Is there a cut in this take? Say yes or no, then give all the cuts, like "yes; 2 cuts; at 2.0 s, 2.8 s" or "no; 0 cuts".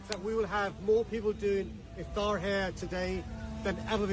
no; 0 cuts